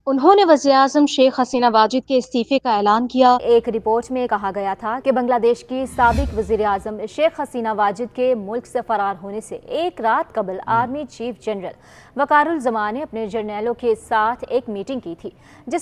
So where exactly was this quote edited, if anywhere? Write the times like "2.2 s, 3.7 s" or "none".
3.4 s